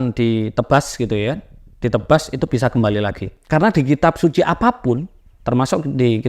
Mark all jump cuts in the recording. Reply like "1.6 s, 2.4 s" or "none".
3.3 s